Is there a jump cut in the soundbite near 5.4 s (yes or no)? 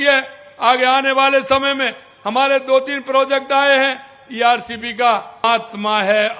yes